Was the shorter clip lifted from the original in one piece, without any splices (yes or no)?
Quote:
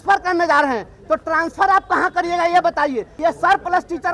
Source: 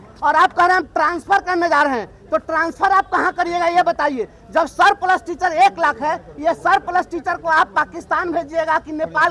no